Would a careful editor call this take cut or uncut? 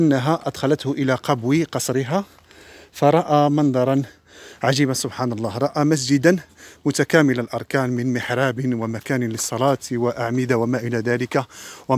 uncut